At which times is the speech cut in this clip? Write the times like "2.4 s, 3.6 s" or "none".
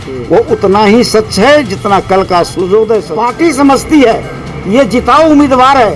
3.1 s